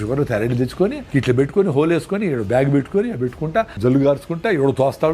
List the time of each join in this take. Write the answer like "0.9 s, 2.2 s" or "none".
1.0 s, 3.7 s